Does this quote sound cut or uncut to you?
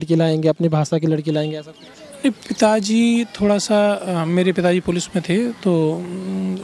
uncut